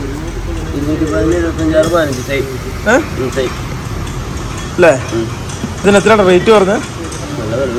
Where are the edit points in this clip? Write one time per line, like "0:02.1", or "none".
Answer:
none